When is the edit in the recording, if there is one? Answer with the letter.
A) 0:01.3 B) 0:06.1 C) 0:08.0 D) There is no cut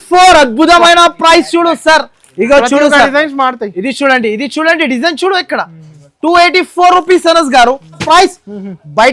C